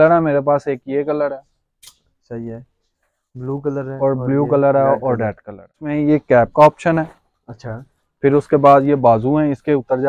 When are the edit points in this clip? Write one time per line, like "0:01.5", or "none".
0:05.8